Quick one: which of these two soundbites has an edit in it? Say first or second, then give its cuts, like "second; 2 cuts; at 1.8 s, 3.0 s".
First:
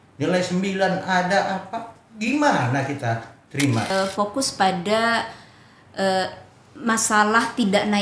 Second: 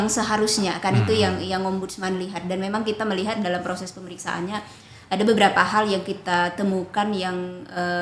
first; 1 cut; at 3.9 s